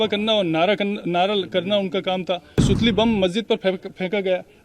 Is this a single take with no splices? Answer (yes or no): no